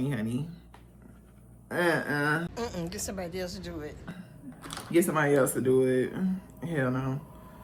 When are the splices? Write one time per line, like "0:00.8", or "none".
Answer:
none